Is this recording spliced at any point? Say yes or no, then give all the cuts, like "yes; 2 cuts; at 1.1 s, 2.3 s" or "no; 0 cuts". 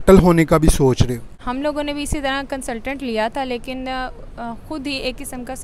yes; 1 cut; at 1.4 s